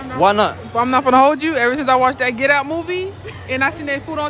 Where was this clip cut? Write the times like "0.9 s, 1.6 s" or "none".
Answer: none